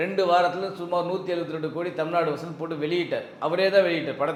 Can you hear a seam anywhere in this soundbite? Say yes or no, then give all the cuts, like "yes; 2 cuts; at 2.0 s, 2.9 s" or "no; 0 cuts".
no; 0 cuts